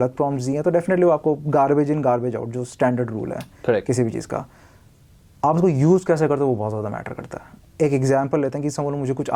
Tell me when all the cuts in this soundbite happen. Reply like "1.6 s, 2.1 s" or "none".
none